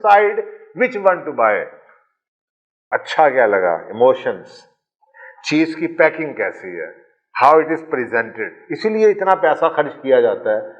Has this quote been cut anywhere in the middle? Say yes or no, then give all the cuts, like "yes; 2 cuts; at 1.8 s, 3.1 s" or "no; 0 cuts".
yes; 1 cut; at 2.8 s